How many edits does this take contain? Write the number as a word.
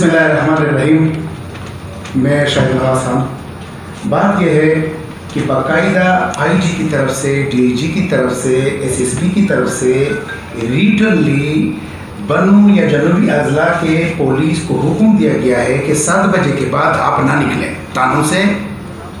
zero